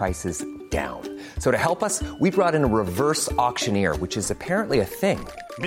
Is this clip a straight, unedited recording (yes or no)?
yes